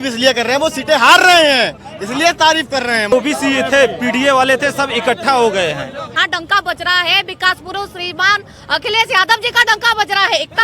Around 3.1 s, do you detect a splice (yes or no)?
yes